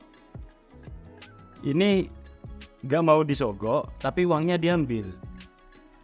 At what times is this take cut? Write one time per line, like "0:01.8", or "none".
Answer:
0:05.1